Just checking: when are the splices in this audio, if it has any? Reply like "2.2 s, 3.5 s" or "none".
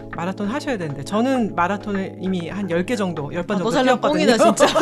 none